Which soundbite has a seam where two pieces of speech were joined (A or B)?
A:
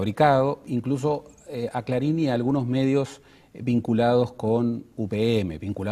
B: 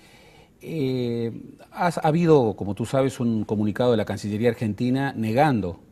A